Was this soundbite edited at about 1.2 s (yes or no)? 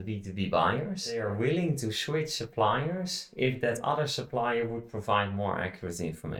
yes